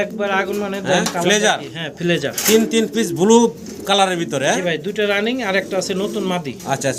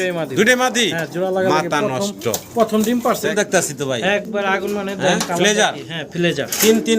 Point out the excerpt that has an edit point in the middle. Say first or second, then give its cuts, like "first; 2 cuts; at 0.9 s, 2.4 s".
second; 1 cut; at 3.2 s